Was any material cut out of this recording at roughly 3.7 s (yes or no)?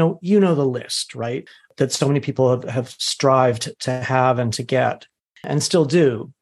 no